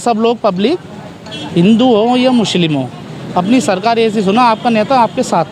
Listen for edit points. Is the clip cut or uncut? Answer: uncut